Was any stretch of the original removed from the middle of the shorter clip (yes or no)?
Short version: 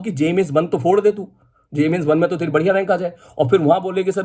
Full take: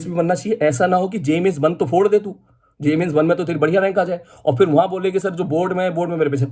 no